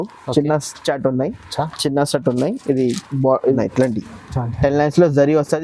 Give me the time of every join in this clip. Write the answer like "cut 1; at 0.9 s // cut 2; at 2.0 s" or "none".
cut 1; at 3.6 s

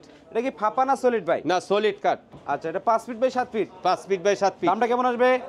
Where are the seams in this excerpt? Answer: cut 1; at 2.4 s

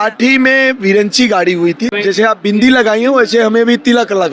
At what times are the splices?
cut 1; at 1.9 s

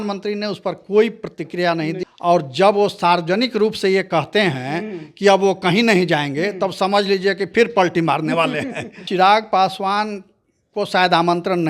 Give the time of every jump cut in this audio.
cut 1; at 2.1 s // cut 2; at 9.1 s

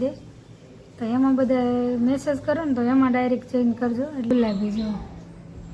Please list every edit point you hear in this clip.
cut 1; at 4.3 s

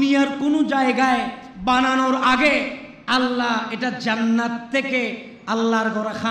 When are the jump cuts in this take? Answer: none

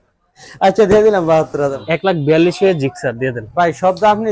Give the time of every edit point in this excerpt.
cut 1; at 1.8 s

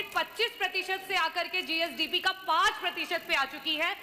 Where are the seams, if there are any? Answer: none

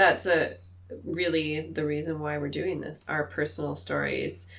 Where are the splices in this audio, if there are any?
cut 1; at 3.0 s

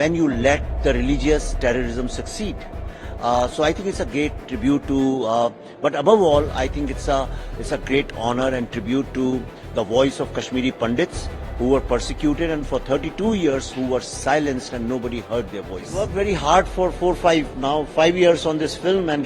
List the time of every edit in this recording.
cut 1; at 16.0 s

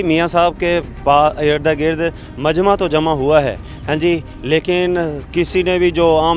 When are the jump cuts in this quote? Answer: none

